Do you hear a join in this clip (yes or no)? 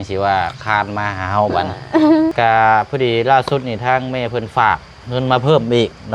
yes